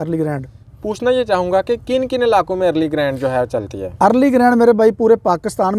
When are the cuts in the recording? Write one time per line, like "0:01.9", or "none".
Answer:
none